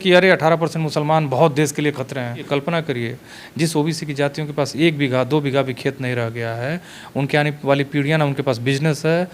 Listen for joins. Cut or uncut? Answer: cut